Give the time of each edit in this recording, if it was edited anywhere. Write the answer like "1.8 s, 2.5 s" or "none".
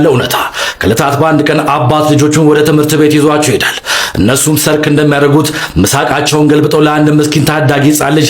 none